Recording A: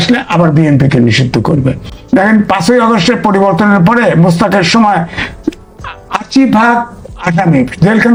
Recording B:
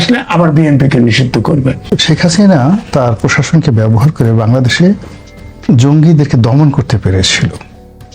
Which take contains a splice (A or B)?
B